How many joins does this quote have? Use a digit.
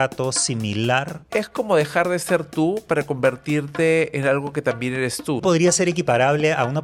2